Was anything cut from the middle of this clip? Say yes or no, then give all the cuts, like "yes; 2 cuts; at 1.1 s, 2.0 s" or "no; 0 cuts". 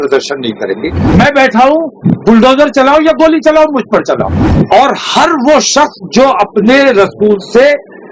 yes; 2 cuts; at 1.0 s, 4.4 s